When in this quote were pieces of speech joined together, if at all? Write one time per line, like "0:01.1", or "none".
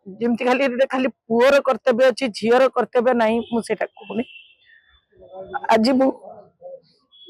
none